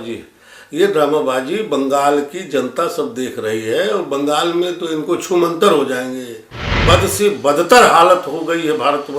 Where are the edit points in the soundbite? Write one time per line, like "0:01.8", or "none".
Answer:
0:06.7

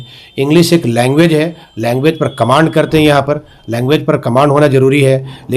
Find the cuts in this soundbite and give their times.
none

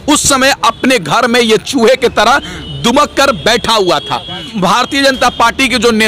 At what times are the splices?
0:04.5

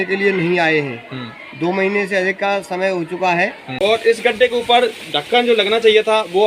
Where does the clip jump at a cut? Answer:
0:03.6

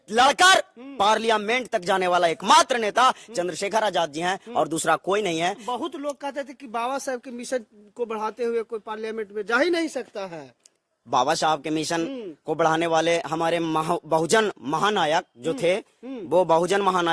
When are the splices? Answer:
none

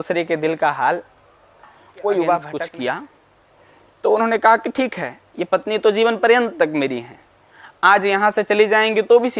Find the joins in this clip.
0:02.5

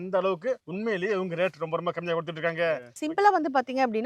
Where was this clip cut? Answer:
0:02.9

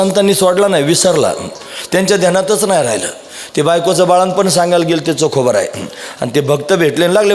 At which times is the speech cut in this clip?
none

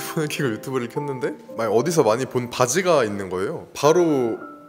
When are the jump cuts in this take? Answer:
0:03.7

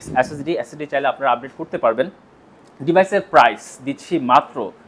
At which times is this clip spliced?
none

